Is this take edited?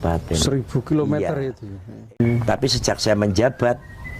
yes; 1 cut; at 2.2 s

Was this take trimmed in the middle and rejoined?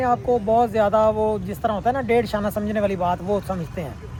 no; 0 cuts

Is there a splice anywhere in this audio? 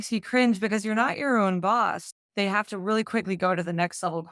yes; 1 cut; at 2.1 s

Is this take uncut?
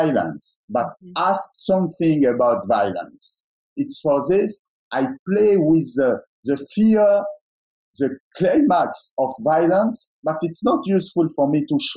yes; 0 cuts

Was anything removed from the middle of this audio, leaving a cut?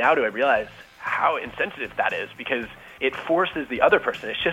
yes; 2 cuts; at 1.9 s, 2.8 s

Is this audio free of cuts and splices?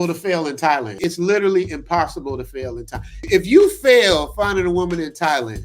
no; 2 cuts; at 1.0 s, 3.3 s

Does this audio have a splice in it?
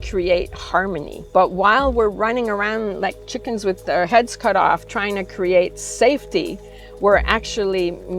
yes; 1 cut; at 1.1 s

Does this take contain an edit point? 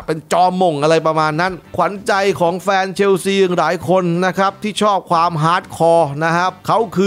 yes; 1 cut; at 1.7 s

